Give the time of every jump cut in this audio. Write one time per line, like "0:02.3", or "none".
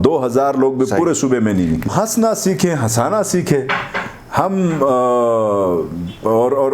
0:01.9